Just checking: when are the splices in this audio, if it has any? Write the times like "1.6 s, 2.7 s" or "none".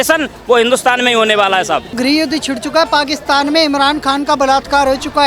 1.9 s